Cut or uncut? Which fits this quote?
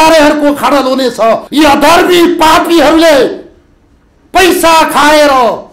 cut